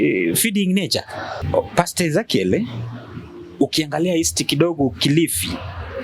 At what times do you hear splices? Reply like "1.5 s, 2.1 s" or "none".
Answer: 1.4 s